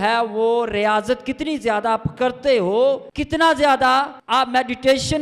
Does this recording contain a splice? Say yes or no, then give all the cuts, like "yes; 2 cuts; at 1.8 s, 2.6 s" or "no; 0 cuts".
yes; 2 cuts; at 3.1 s, 4.2 s